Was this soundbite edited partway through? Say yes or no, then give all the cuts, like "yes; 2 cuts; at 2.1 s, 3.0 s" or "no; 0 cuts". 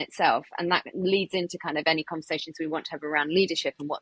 no; 0 cuts